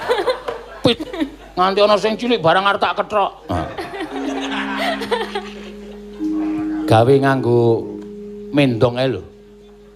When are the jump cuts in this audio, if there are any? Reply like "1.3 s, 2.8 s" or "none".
0.9 s